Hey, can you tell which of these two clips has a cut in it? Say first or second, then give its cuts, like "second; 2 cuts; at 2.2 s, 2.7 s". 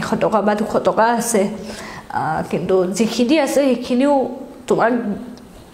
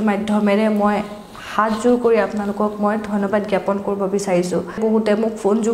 second; 1 cut; at 4.8 s